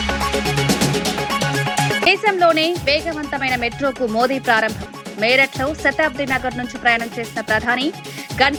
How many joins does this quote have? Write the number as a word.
zero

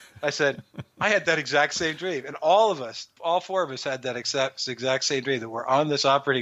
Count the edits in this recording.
one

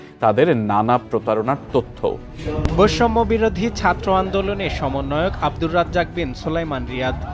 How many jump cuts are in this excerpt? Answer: one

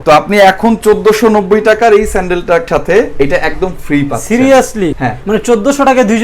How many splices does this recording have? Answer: two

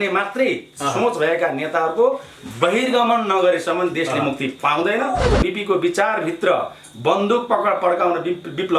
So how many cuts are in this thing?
one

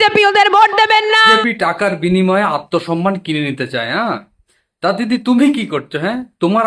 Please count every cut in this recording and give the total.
one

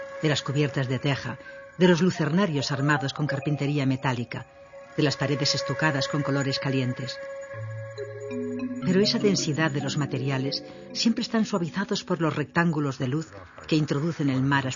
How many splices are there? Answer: one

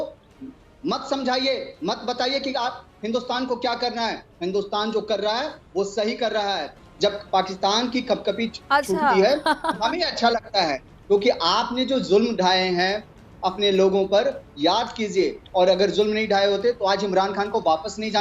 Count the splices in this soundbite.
one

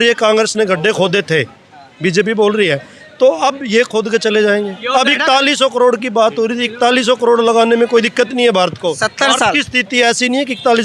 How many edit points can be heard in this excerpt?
zero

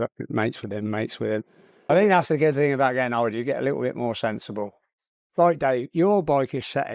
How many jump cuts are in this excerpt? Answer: two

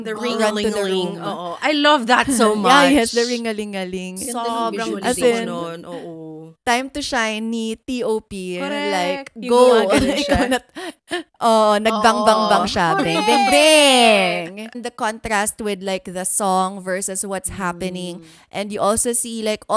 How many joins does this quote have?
two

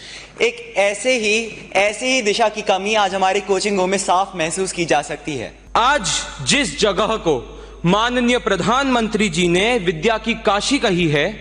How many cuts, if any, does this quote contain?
one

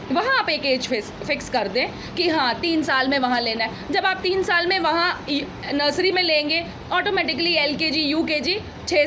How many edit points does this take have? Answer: zero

